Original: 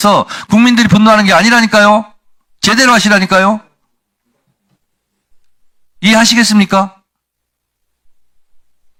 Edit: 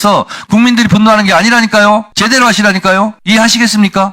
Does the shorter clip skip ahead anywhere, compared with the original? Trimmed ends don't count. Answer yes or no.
yes